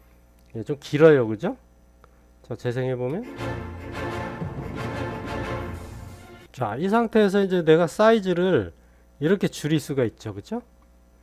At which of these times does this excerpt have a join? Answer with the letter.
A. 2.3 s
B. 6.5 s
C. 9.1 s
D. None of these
B